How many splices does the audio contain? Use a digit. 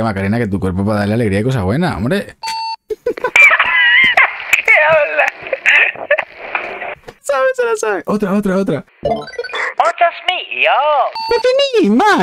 0